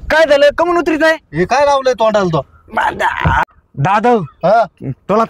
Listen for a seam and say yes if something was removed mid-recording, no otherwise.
yes